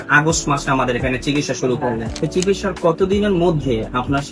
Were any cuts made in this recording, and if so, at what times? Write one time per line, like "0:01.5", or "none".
0:02.1